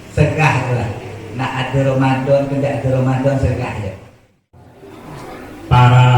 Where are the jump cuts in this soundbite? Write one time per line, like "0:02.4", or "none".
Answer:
0:04.6